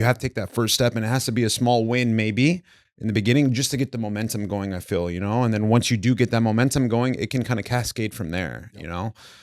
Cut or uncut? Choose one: uncut